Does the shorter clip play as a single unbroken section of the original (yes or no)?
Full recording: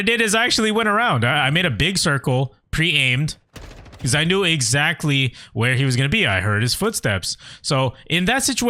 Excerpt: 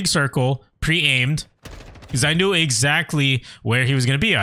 yes